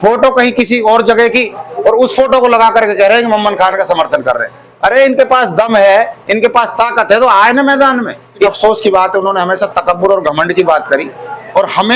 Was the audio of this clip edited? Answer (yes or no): yes